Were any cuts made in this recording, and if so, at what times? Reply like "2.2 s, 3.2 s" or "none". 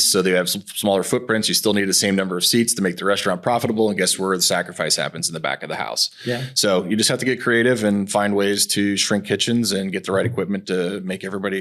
none